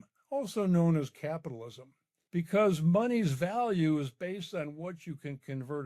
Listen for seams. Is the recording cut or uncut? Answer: cut